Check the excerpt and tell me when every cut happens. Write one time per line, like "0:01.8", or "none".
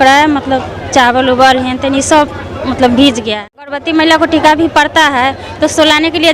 0:03.8